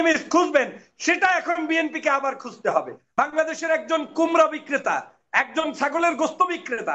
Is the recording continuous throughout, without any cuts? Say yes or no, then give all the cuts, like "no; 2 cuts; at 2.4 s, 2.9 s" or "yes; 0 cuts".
no; 1 cut; at 3.0 s